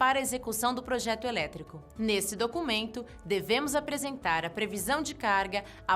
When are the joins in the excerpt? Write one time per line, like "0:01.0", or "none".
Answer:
0:02.4